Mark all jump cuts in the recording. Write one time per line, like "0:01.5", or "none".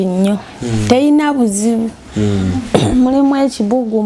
none